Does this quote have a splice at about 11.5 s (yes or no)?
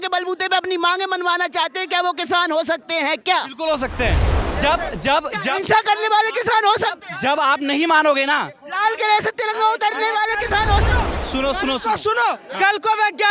no